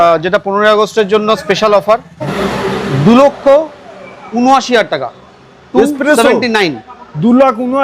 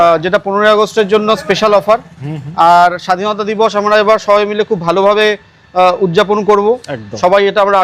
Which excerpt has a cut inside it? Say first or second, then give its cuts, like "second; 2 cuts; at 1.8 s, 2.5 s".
first; 1 cut; at 2.4 s